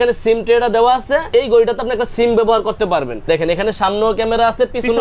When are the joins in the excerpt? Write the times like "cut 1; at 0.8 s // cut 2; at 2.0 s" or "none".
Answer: cut 1; at 1.3 s // cut 2; at 3.2 s